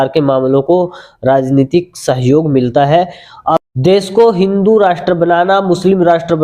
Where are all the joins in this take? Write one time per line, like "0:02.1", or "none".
0:03.6